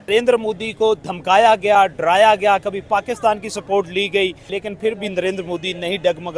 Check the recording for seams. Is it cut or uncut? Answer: cut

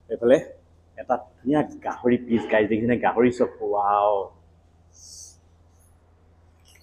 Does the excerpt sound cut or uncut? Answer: uncut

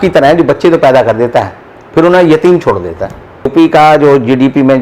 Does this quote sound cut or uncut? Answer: cut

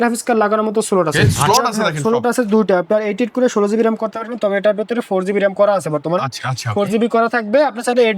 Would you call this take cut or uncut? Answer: cut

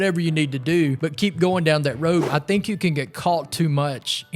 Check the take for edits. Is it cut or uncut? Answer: cut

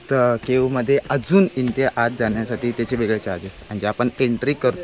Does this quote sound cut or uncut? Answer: uncut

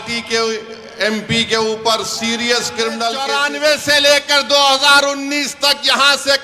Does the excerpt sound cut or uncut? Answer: cut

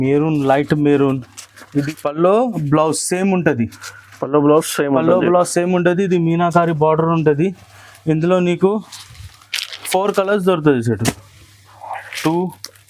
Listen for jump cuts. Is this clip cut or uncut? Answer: cut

